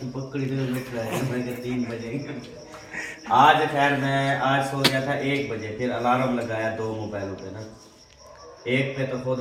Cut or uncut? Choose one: uncut